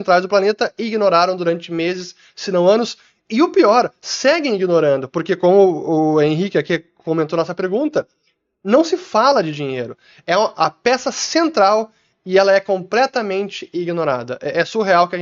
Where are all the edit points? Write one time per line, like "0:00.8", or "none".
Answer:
none